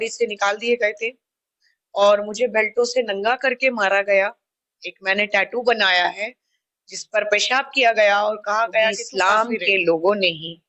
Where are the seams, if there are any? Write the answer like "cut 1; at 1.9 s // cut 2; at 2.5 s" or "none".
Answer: cut 1; at 9.0 s

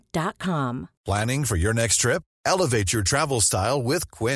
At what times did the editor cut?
cut 1; at 0.9 s

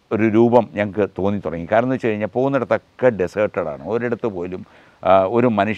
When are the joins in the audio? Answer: none

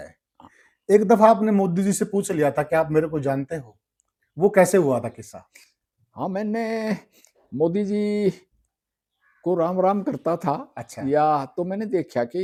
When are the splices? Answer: none

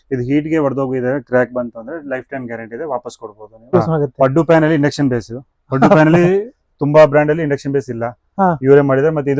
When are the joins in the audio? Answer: cut 1; at 3.7 s

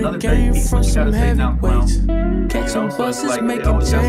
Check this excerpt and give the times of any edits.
none

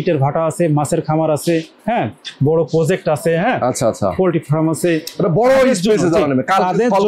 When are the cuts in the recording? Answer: none

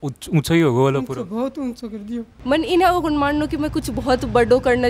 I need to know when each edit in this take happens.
cut 1; at 2.3 s

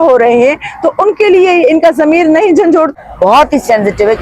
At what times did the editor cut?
cut 1; at 3.0 s

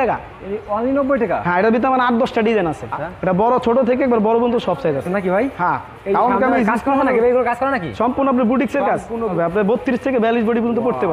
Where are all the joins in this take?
cut 1; at 2.9 s // cut 2; at 5.1 s // cut 3; at 9.3 s

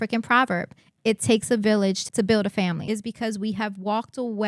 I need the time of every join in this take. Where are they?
cut 1; at 2.0 s // cut 2; at 2.8 s

